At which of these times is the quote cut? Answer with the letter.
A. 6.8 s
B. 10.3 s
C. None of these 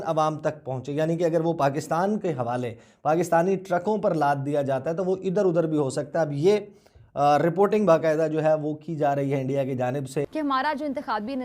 B